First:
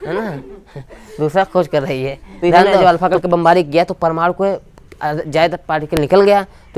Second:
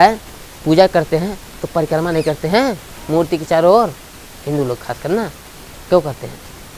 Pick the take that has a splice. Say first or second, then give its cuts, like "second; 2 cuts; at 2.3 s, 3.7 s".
first; 1 cut; at 2.7 s